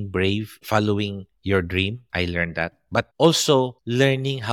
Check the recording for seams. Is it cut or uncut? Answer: uncut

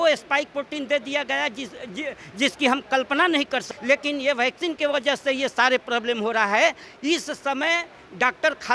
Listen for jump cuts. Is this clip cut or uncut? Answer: cut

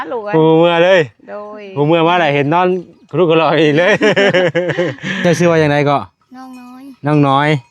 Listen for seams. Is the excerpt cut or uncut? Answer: cut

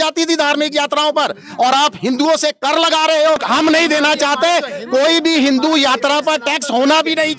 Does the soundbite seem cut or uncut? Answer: cut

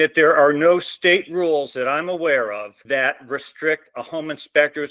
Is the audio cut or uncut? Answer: cut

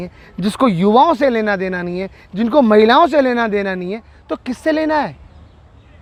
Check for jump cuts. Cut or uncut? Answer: uncut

